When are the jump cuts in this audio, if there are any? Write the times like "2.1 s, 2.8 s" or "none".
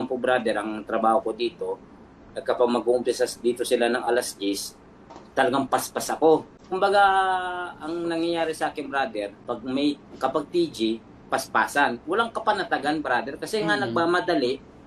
6.6 s, 9.4 s

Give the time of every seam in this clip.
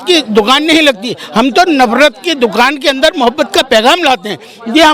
none

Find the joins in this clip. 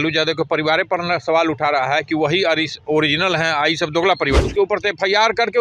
4.4 s

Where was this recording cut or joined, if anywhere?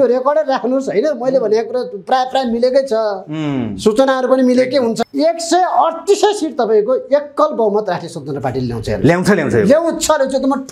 none

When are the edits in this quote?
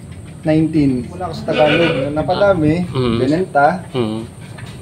1.3 s, 2.2 s

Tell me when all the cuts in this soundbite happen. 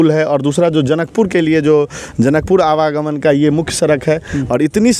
none

